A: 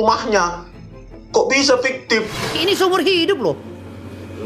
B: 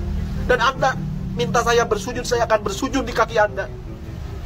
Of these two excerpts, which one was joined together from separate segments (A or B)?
A